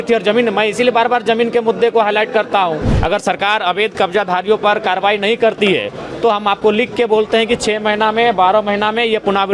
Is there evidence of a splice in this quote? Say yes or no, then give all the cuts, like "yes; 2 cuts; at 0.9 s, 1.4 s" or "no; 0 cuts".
yes; 1 cut; at 2.9 s